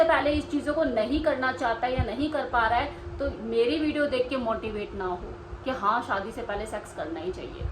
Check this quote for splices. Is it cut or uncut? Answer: uncut